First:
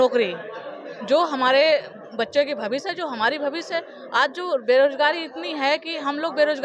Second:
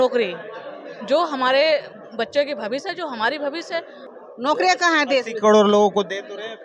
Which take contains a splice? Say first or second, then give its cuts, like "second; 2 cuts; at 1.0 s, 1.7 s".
second; 1 cut; at 4.0 s